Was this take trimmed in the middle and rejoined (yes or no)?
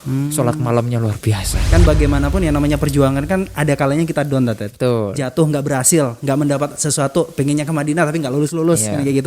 yes